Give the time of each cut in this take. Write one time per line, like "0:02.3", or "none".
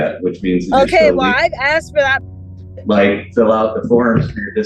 0:02.2